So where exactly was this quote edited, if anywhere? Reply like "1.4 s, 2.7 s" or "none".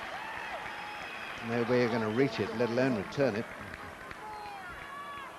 none